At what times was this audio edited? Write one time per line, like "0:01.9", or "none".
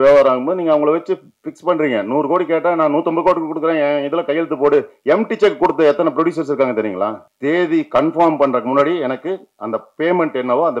0:07.3

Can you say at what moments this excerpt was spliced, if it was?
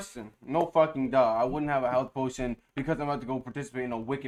none

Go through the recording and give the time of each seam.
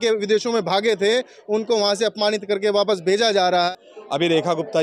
0:03.7

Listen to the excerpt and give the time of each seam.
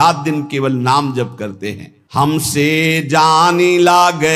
none

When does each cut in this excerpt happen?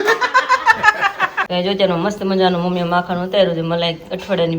0:01.4

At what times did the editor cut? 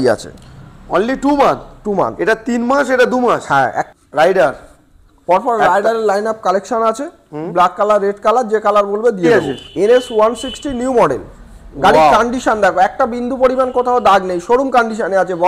0:03.8
0:09.3

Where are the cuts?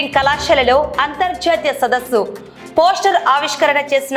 none

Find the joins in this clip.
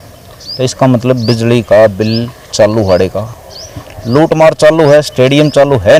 none

